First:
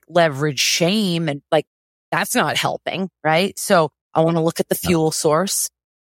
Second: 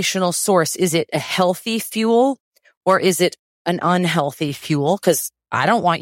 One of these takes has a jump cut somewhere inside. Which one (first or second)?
first